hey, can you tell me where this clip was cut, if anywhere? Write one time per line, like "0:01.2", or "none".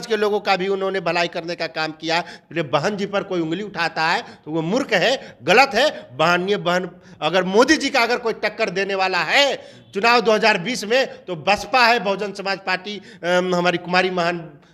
none